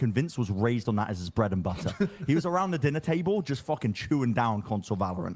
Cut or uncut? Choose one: uncut